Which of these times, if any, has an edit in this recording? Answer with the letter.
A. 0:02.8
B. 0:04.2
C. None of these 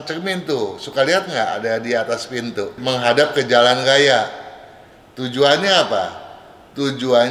A